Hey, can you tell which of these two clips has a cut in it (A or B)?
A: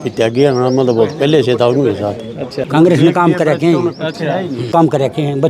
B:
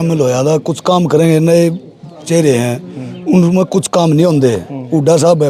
A